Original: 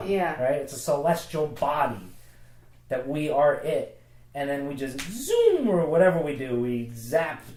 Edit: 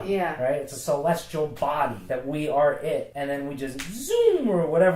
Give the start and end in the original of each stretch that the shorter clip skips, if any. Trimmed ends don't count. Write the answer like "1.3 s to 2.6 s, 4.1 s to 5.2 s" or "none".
2.0 s to 2.8 s, 3.9 s to 4.3 s